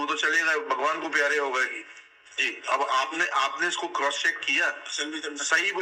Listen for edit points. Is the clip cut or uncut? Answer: uncut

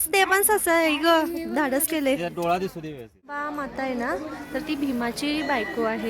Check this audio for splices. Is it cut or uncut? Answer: cut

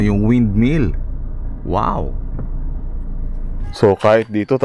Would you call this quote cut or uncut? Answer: cut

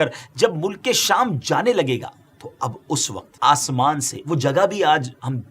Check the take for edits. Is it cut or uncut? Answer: cut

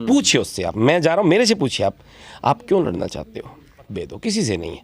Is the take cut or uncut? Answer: cut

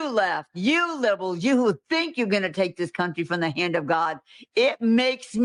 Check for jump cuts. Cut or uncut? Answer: uncut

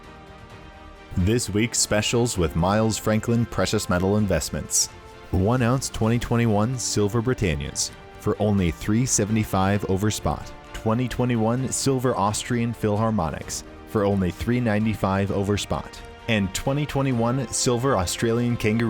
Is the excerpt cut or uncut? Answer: cut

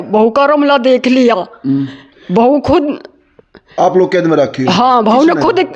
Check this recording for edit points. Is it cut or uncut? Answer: uncut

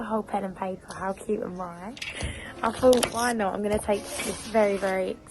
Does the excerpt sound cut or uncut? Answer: uncut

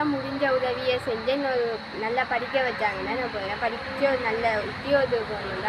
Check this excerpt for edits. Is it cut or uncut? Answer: uncut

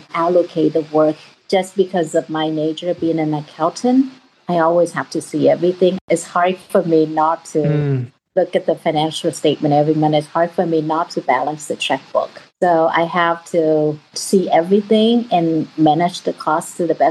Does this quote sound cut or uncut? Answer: cut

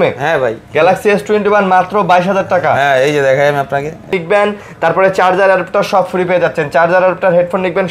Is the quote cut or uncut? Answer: cut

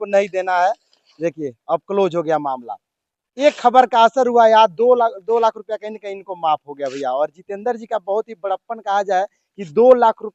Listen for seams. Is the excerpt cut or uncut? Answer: uncut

